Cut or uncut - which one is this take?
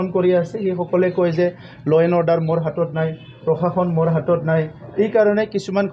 uncut